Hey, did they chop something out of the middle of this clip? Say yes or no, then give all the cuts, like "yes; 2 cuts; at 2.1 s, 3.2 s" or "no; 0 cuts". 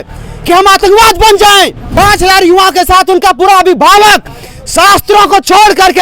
yes; 1 cut; at 1.8 s